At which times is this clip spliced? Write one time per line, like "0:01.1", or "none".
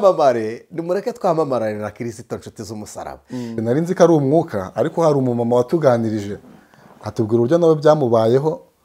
0:03.6